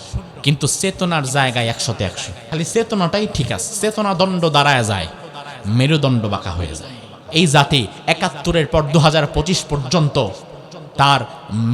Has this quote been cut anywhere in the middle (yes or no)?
yes